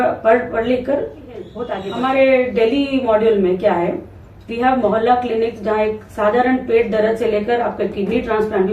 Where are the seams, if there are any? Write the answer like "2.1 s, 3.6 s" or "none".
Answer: 1.6 s